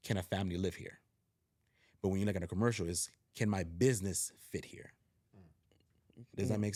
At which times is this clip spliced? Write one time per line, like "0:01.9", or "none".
none